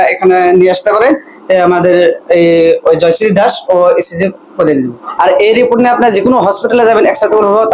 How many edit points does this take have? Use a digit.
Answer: 1